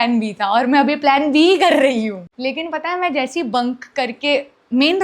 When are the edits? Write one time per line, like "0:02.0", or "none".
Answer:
0:02.3